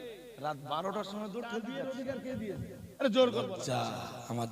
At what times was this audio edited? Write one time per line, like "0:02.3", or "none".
0:01.7
0:02.8
0:03.6